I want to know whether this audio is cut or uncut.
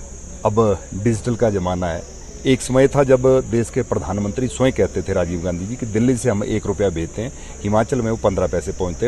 uncut